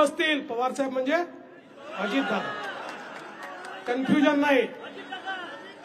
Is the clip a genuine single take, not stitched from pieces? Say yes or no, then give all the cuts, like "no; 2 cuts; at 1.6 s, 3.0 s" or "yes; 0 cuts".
yes; 0 cuts